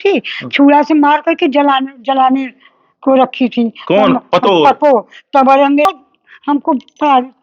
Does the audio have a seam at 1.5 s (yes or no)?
no